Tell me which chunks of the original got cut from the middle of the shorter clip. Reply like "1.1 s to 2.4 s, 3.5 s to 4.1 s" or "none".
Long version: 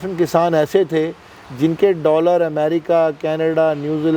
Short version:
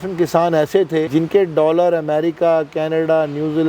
1.1 s to 1.5 s